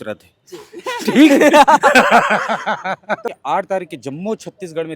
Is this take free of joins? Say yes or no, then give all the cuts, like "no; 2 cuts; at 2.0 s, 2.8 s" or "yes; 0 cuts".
no; 1 cut; at 3.3 s